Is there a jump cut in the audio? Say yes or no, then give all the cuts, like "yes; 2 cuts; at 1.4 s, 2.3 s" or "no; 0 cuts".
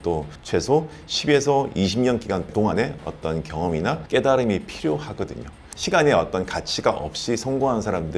no; 0 cuts